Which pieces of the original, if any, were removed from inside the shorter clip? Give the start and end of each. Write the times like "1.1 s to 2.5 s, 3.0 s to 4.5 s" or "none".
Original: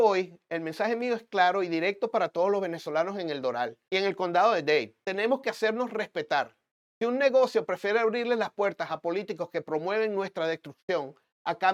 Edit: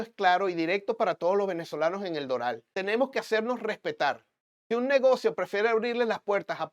3.8 s to 5.0 s